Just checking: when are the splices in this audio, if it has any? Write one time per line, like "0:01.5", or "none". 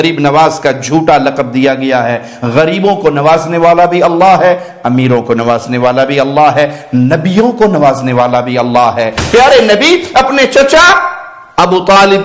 0:09.2